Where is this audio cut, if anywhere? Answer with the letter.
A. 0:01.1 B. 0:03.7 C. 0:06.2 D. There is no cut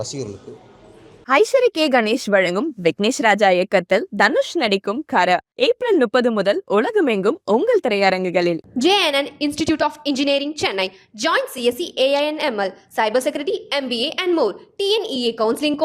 A